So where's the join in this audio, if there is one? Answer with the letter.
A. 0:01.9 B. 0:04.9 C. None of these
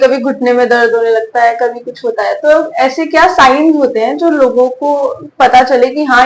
C